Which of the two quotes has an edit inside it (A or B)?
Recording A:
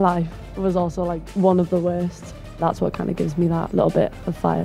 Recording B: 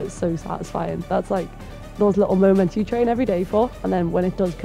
A